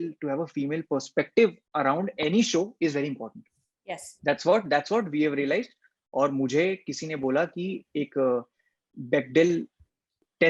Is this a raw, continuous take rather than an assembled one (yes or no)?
yes